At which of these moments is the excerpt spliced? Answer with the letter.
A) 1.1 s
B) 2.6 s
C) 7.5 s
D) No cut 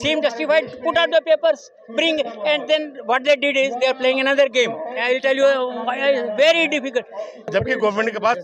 C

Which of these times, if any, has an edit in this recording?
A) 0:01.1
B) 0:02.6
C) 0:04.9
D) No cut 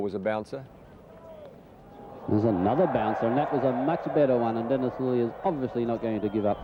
D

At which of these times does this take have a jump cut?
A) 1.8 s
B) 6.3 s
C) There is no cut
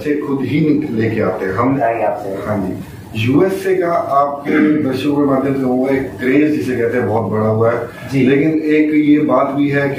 A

